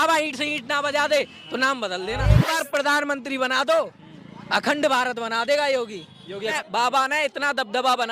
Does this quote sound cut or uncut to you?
cut